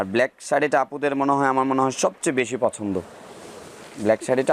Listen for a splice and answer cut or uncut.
uncut